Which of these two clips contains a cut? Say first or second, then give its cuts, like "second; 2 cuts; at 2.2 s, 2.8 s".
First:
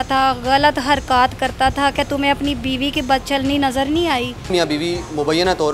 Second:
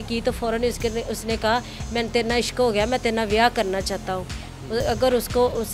first; 1 cut; at 4.5 s